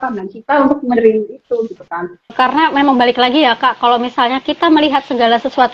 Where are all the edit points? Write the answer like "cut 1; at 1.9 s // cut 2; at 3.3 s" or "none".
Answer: cut 1; at 2.3 s

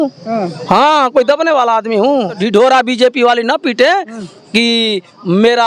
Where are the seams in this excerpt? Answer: cut 1; at 2.4 s

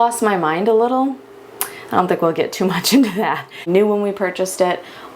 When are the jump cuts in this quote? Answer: cut 1; at 3.6 s

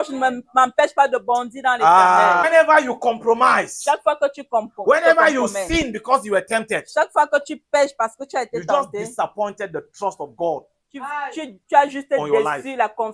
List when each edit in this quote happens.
cut 1; at 2.4 s

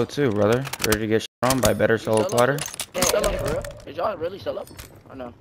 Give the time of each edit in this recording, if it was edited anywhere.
cut 1; at 2.9 s // cut 2; at 3.8 s

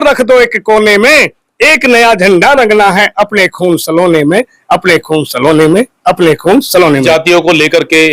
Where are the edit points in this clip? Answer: cut 1; at 7.0 s

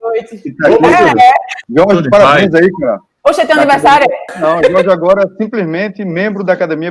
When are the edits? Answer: cut 1; at 1.6 s // cut 2; at 3.1 s // cut 3; at 4.3 s

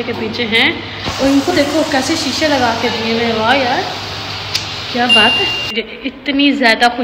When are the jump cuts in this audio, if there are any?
cut 1; at 5.7 s

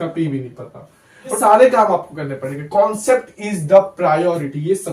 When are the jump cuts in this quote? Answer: cut 1; at 1.4 s

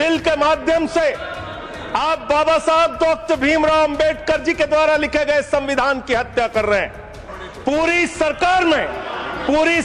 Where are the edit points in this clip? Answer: cut 1; at 7.3 s

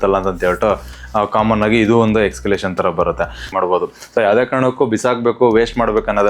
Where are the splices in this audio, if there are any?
cut 1; at 3.5 s

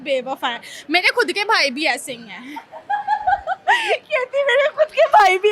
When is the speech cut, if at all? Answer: none

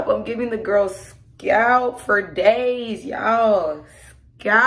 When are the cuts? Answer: none

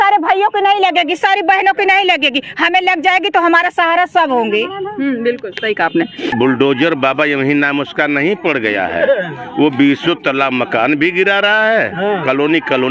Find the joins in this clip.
cut 1; at 6.3 s

